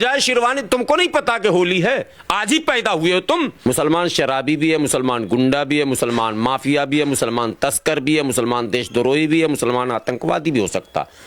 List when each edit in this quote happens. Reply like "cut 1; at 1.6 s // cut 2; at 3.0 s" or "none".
cut 1; at 3.6 s